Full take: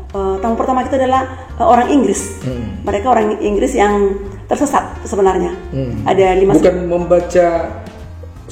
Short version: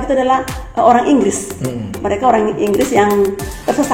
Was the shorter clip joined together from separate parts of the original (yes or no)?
no